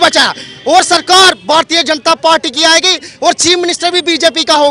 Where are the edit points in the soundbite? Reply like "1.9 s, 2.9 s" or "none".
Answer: none